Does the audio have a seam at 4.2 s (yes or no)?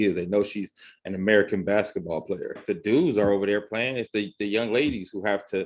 no